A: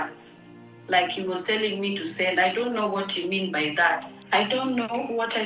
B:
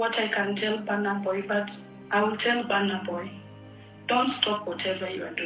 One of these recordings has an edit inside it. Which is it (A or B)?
A